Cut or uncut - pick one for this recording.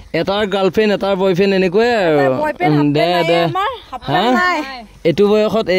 uncut